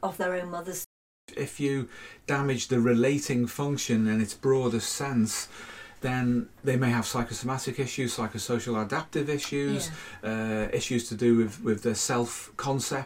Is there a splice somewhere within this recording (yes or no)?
yes